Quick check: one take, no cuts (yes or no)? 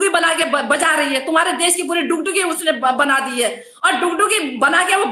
yes